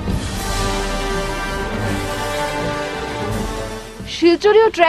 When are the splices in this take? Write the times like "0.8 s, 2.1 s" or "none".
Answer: none